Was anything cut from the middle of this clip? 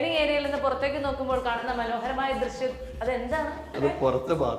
yes; 1 cut; at 3.7 s

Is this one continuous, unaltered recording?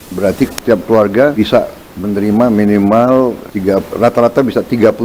no; 2 cuts; at 1.3 s, 3.5 s

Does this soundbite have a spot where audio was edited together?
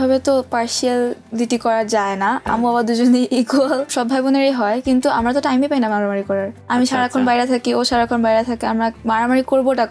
yes; 3 cuts; at 2.4 s, 3.9 s, 6.6 s

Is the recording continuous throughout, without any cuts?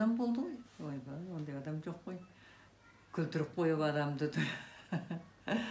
yes; 0 cuts

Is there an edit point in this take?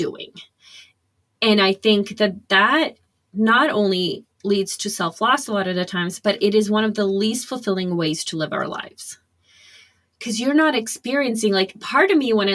no; 0 cuts

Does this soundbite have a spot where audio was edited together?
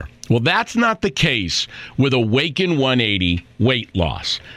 no; 0 cuts

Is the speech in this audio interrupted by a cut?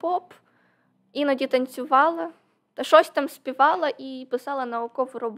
no; 0 cuts

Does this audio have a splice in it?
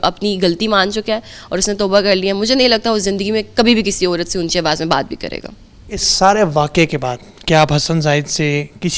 no; 0 cuts

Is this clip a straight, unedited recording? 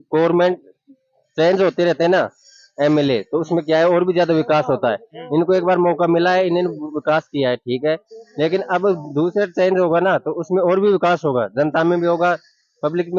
yes; 0 cuts

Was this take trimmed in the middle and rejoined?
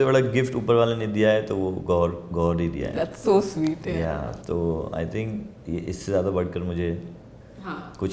no; 0 cuts

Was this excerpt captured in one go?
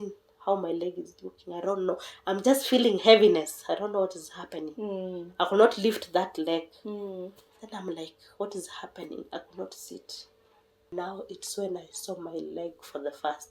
no; 1 cut; at 10.9 s

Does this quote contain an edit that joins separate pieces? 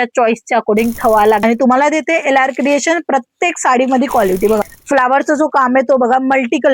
yes; 2 cuts; at 1.4 s, 4.8 s

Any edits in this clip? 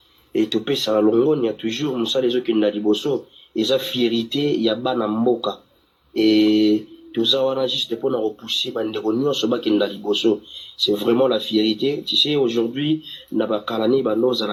no; 0 cuts

